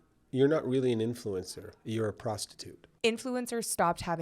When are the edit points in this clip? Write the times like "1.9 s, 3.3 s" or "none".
2.9 s